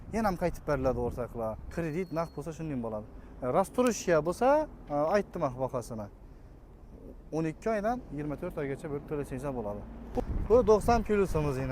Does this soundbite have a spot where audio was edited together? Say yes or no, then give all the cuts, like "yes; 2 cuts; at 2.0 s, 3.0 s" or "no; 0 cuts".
yes; 2 cuts; at 1.6 s, 10.2 s